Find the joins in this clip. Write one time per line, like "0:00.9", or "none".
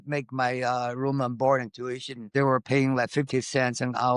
0:02.3